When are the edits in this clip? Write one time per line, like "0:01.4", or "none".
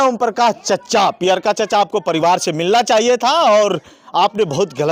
none